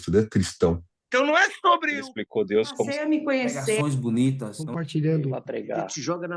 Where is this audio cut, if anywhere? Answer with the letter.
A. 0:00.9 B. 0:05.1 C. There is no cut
A